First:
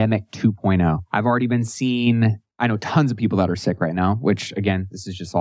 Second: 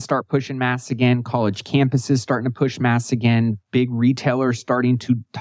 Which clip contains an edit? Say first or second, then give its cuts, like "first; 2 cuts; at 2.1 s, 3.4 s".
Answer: first; 2 cuts; at 1.0 s, 2.5 s